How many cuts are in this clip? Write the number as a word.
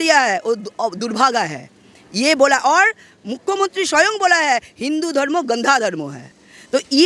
zero